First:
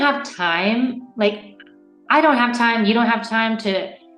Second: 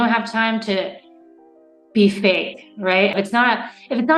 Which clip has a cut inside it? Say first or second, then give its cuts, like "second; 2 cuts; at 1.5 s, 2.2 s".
second; 1 cut; at 3.1 s